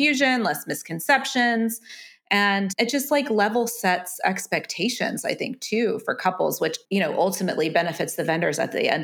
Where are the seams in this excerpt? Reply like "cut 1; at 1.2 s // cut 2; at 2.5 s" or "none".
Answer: cut 1; at 2.7 s // cut 2; at 6.8 s